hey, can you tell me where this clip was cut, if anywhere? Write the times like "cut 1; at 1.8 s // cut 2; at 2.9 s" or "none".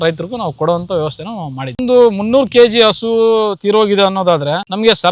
cut 1; at 1.8 s